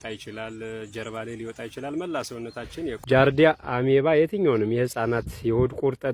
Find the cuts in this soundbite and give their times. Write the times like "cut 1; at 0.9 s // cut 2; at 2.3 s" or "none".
cut 1; at 3.0 s